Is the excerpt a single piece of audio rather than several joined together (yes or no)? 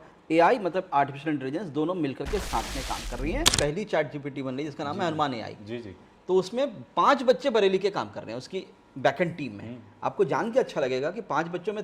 no